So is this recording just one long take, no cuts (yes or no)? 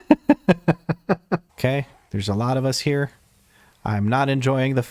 no